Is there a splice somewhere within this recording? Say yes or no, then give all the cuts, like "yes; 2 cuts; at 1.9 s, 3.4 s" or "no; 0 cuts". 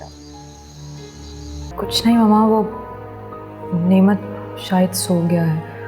yes; 1 cut; at 1.7 s